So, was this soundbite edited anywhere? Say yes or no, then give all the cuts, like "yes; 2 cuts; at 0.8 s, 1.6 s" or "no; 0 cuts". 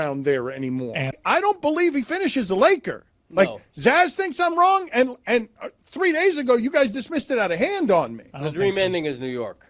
yes; 1 cut; at 1.2 s